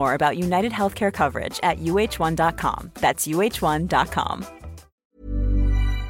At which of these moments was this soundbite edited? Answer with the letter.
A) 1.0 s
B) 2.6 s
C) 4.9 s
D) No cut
C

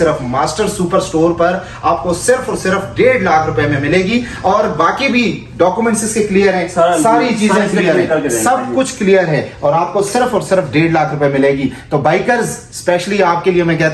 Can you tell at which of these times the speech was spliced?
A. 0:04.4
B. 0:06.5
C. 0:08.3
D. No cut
D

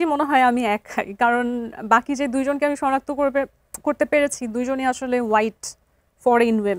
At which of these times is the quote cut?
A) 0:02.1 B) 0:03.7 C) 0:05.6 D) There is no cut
D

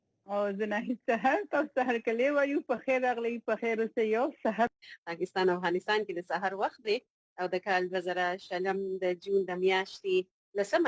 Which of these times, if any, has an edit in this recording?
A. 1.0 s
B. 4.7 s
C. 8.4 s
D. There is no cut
B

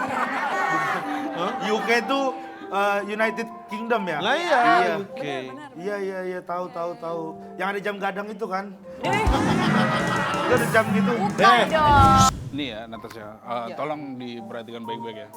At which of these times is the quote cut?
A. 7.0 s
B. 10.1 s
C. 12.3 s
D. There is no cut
C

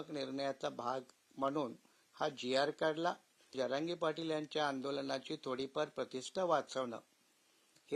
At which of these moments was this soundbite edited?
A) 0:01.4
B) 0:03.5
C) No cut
B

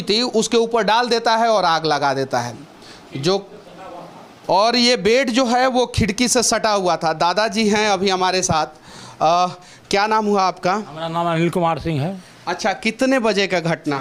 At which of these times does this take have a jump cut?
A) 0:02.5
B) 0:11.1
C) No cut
C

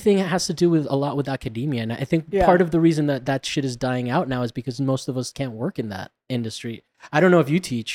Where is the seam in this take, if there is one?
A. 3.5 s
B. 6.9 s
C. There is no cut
B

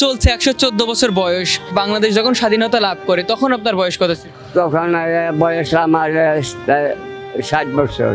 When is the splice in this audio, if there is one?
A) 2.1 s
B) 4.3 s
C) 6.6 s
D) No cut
B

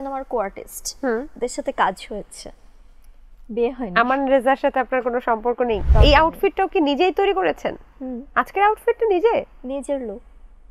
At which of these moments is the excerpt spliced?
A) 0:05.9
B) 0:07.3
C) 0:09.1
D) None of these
A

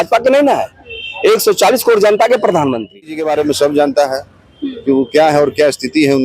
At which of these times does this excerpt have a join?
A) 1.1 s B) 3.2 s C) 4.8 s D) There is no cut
B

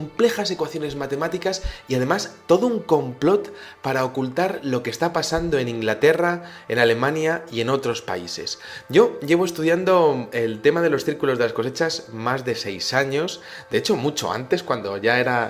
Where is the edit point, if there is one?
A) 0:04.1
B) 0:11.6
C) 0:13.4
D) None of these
A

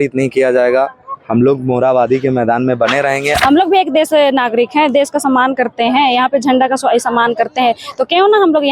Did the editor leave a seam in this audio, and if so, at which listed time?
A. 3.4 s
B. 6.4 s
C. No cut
A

